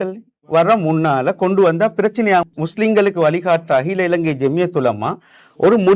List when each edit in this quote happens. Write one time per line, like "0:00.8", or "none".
0:02.5